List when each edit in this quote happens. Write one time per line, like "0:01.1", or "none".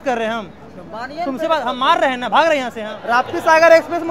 0:02.9